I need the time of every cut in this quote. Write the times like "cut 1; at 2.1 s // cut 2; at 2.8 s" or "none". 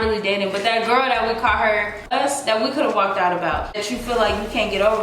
cut 1; at 2.1 s // cut 2; at 3.8 s

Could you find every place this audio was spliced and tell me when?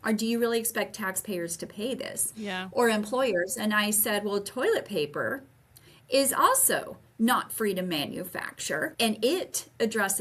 cut 1; at 8.9 s

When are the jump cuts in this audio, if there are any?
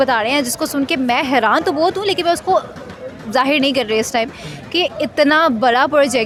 none

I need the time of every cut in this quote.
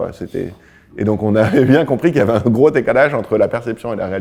none

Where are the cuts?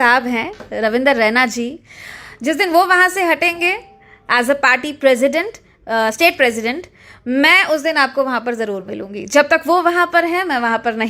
none

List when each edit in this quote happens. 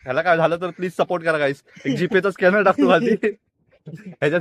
none

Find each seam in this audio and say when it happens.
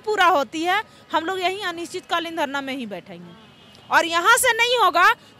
none

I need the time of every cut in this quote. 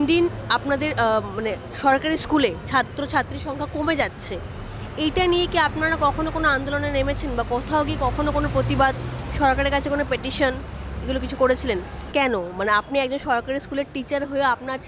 cut 1; at 12.0 s

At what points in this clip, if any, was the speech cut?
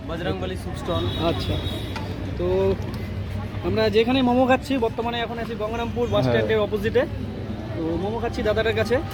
none

